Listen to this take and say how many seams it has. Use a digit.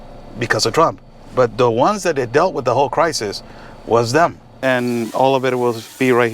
1